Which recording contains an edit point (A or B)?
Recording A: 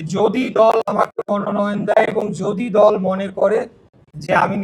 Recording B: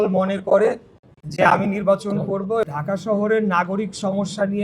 B